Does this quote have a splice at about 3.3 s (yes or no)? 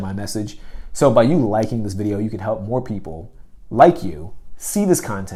no